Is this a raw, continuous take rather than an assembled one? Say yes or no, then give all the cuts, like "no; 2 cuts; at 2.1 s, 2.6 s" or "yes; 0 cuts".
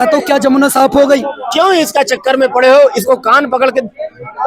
no; 1 cut; at 1.4 s